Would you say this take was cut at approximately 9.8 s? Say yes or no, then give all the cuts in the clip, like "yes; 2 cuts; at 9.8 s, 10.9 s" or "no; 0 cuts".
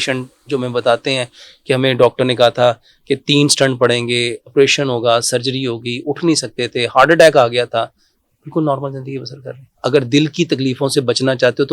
yes; 1 cut; at 9.8 s